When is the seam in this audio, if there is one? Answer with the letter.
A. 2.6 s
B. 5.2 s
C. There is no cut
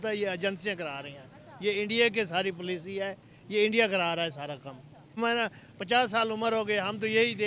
B